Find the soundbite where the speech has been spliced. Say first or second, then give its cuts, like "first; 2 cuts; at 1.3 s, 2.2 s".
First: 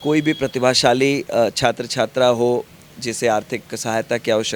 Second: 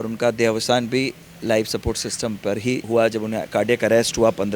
second; 1 cut; at 2.8 s